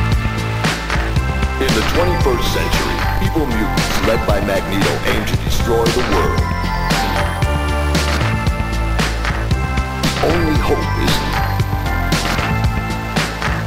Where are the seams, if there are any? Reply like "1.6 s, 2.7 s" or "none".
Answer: none